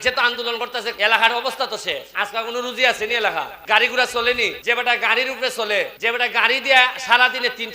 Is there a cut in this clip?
yes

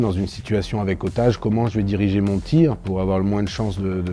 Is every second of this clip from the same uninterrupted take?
yes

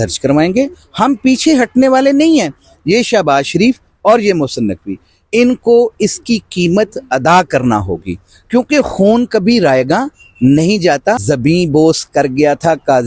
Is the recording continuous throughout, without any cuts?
no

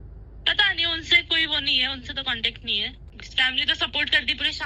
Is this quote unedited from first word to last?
no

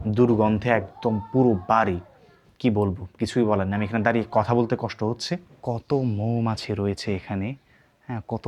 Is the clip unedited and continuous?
no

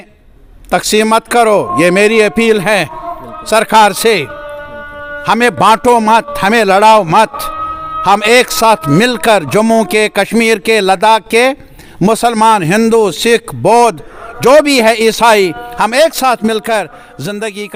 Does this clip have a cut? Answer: no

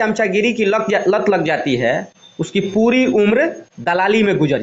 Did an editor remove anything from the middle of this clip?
no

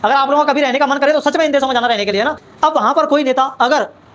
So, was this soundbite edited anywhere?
yes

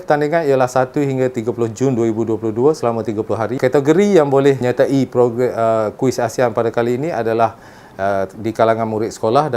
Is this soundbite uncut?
no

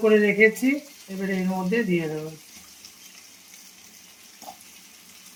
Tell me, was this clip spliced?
no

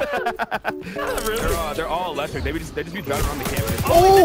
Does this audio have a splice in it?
yes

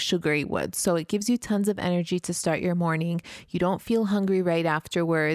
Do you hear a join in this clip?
no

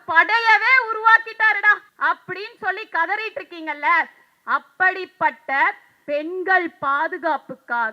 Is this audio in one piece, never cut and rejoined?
no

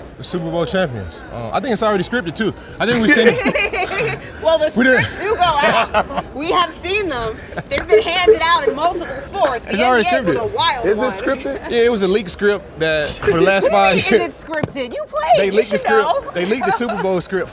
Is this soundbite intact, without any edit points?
yes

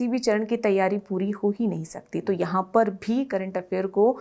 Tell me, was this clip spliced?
no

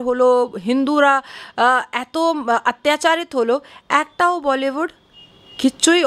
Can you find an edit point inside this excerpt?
no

